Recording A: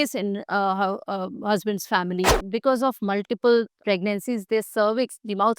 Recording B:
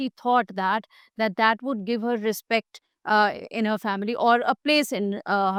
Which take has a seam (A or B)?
A